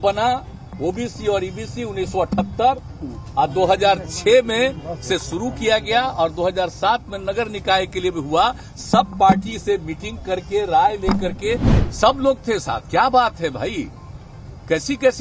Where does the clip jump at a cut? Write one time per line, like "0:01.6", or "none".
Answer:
0:11.7